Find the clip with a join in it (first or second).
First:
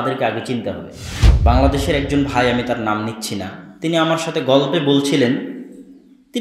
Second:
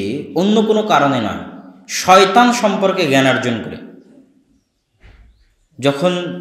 first